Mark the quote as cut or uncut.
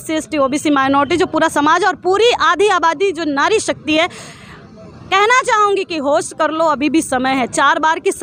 uncut